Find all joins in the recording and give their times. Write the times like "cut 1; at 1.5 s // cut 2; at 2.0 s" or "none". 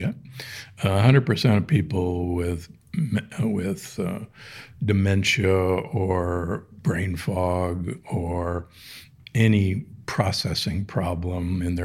none